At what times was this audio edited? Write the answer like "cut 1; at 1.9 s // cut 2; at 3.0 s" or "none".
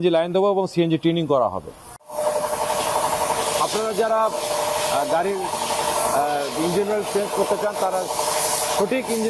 cut 1; at 2.1 s